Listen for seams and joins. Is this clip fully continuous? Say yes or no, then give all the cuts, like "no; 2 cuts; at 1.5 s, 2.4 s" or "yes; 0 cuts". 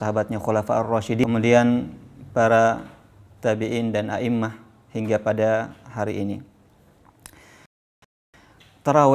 no; 2 cuts; at 1.2 s, 8.3 s